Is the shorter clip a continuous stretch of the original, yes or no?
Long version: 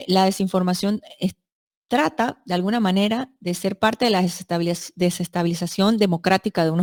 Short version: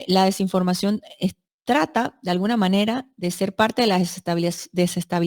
no